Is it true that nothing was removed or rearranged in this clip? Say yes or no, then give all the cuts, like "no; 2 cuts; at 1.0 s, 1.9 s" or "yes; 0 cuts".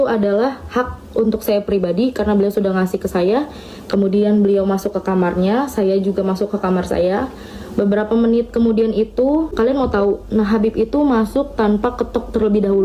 no; 1 cut; at 9.5 s